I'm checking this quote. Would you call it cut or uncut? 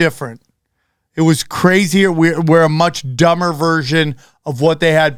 uncut